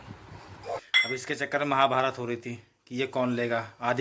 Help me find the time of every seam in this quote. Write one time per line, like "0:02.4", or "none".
0:00.9

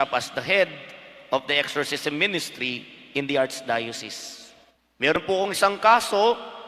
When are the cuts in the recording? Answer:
0:05.2

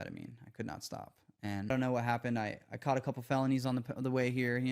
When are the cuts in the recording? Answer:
0:01.7

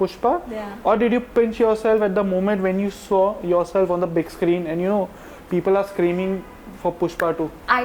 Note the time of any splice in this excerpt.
none

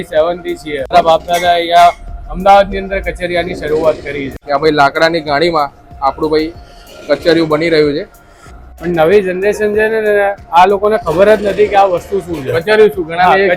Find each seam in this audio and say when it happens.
0:00.9
0:04.3
0:08.8

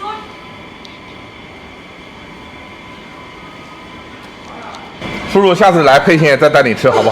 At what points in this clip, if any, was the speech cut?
0:05.1

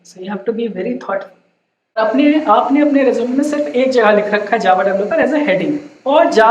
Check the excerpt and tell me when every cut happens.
0:02.0

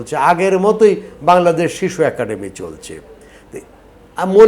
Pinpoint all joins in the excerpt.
none

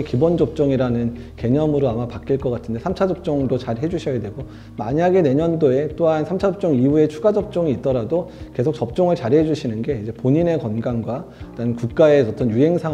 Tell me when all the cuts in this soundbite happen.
none

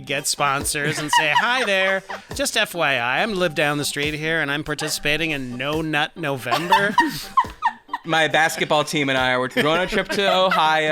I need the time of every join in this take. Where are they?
0:02.3
0:08.0
0:09.5

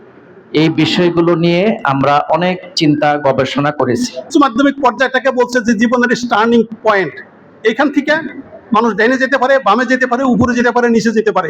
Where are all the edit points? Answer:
0:04.3
0:06.7

